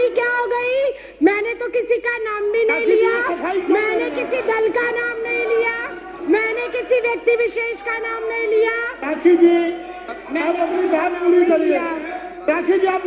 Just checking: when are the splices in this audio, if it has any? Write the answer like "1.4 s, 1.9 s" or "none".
none